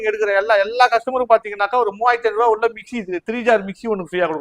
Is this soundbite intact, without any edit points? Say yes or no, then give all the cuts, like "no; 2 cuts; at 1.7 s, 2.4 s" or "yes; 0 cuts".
yes; 0 cuts